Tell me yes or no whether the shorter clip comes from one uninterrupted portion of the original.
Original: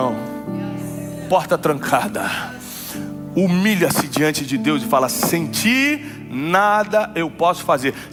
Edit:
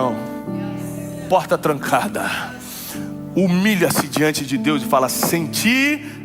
yes